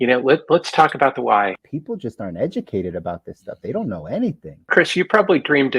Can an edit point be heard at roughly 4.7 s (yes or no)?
yes